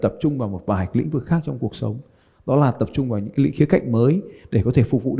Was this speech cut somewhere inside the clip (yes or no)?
no